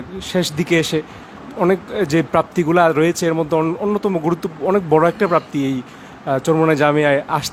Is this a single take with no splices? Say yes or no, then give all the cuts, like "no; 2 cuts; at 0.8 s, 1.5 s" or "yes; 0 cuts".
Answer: yes; 0 cuts